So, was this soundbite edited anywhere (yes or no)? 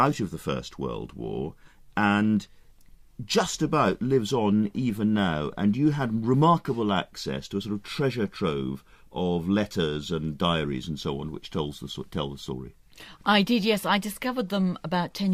yes